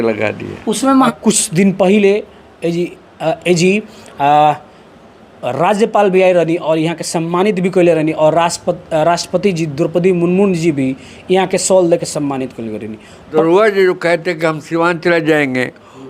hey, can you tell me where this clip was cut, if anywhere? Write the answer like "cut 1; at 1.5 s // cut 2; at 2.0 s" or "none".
cut 1; at 1.1 s // cut 2; at 13.3 s